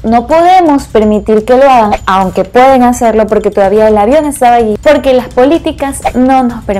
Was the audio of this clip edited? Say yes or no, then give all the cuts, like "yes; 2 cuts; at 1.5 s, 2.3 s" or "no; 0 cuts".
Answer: no; 0 cuts